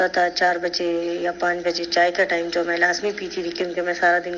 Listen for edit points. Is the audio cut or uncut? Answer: uncut